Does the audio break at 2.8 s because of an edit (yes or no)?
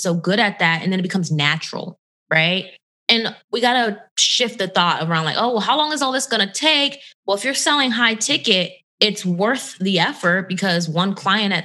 no